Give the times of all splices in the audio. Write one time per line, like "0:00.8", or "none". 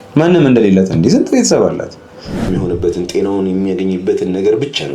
0:02.5